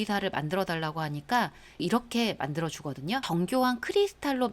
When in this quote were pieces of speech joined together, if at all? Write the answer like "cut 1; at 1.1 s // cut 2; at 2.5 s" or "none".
cut 1; at 1.8 s // cut 2; at 3.2 s